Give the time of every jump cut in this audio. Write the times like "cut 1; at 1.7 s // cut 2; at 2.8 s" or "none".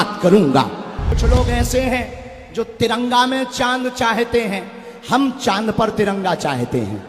cut 1; at 1.2 s